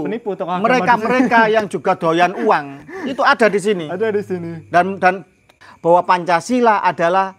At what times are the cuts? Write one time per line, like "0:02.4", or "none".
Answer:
0:05.4